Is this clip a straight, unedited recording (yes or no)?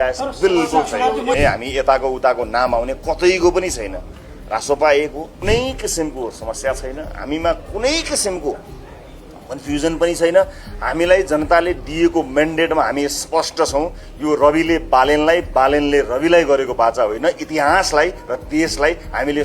no